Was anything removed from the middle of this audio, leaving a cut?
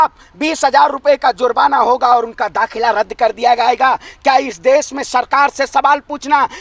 no; 0 cuts

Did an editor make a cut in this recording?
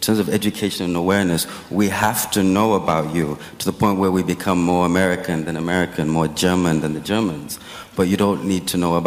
no; 0 cuts

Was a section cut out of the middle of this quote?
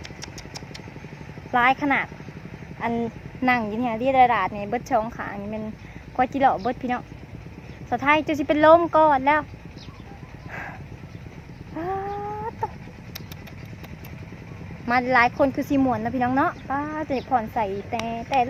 no; 0 cuts

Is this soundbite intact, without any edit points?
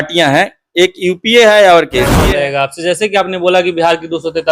no; 1 cut; at 2.2 s

